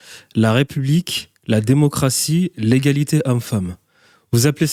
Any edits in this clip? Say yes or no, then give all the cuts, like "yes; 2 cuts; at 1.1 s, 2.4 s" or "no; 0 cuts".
no; 0 cuts